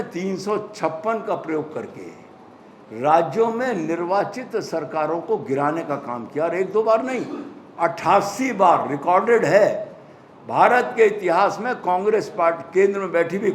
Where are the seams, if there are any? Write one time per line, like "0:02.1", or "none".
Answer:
none